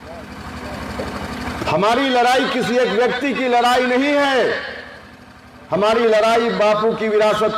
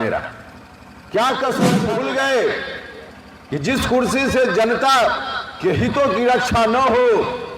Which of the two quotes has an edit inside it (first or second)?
second